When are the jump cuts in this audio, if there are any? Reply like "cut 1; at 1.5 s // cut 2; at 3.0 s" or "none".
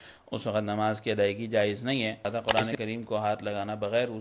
cut 1; at 2.3 s